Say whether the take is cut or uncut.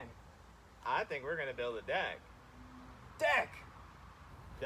uncut